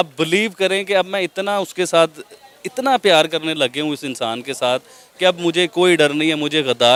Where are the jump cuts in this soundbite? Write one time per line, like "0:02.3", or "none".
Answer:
none